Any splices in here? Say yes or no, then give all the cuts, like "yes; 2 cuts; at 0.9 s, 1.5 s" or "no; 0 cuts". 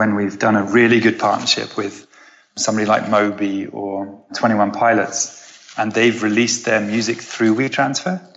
yes; 1 cut; at 4.3 s